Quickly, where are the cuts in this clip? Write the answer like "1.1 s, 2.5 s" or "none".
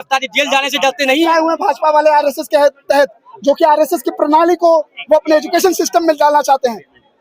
1.3 s